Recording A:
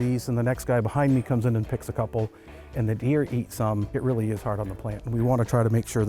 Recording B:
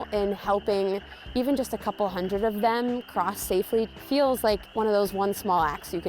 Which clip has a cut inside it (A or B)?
B